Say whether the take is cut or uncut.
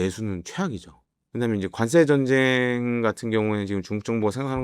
uncut